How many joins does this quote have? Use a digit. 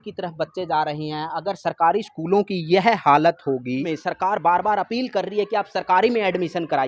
1